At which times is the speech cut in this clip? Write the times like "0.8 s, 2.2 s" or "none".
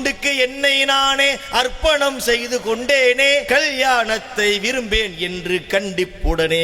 3.5 s